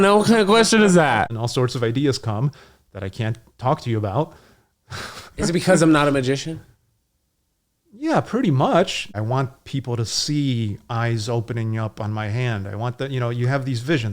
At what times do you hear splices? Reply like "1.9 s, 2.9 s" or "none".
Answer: 1.3 s, 9.1 s